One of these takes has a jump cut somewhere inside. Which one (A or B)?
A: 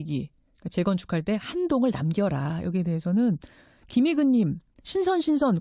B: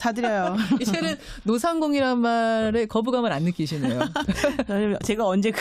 B